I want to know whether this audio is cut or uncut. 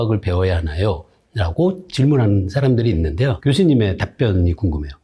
uncut